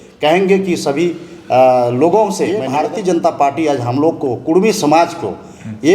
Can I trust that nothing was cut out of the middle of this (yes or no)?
no